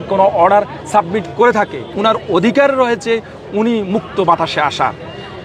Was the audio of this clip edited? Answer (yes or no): yes